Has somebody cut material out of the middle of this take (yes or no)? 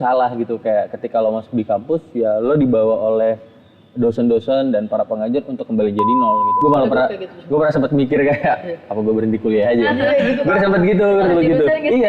yes